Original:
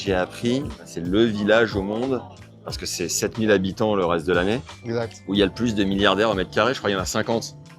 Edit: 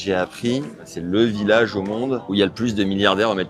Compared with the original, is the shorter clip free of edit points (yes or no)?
no